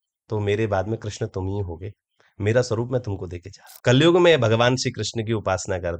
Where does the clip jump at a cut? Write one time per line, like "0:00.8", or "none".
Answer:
0:03.7